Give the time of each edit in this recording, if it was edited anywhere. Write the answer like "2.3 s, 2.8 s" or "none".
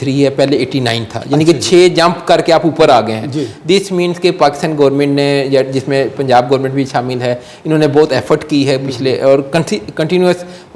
none